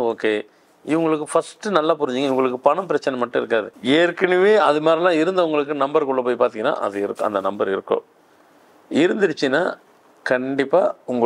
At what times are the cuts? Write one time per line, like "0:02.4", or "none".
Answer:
0:03.7